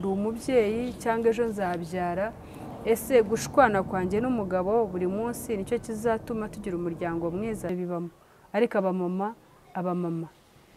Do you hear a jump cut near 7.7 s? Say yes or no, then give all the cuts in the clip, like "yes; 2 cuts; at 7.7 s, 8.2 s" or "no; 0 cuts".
yes; 1 cut; at 7.7 s